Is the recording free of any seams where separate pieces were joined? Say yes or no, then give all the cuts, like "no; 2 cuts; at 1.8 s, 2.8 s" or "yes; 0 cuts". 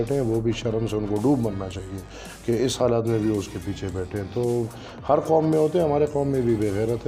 yes; 0 cuts